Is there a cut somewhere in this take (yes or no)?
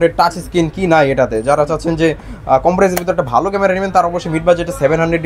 no